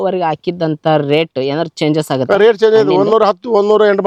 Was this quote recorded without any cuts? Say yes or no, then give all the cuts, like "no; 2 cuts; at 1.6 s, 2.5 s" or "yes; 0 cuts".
yes; 0 cuts